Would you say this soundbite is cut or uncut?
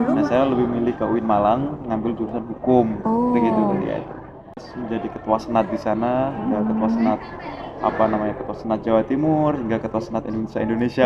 cut